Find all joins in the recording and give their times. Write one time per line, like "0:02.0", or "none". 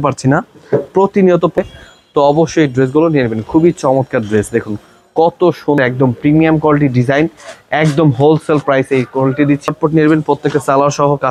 0:01.6
0:05.8
0:09.6